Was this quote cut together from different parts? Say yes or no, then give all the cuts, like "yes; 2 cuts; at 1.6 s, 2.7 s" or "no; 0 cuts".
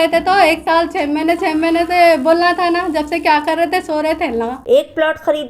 yes; 1 cut; at 4.6 s